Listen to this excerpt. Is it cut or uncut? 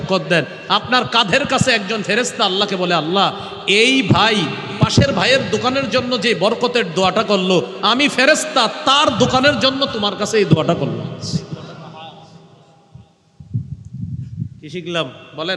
uncut